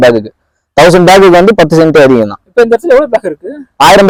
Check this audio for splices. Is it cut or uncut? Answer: uncut